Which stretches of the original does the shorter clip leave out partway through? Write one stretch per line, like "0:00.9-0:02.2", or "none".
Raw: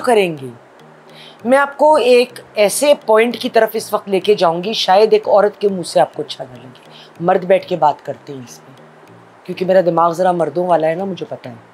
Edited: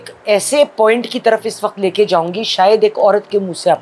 none

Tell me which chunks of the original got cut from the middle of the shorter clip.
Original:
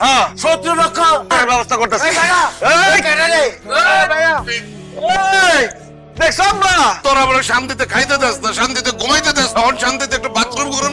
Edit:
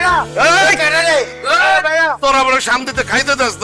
0:04.4-0:07.0

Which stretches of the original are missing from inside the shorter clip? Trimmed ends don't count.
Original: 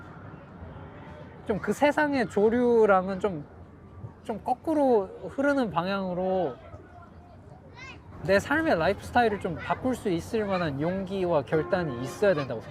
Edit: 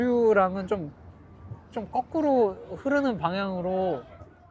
none

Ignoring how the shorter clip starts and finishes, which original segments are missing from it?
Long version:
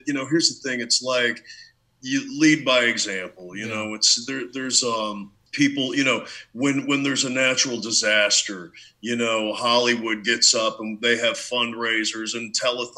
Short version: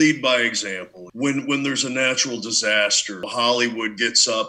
0:03.4-0:06.4
0:08.7-0:09.5

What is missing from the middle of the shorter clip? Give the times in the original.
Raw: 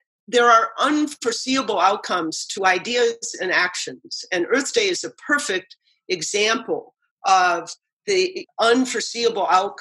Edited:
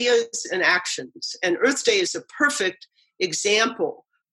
none

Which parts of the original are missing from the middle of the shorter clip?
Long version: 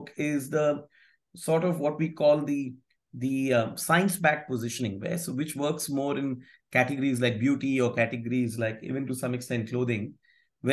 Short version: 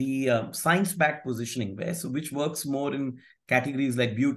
none

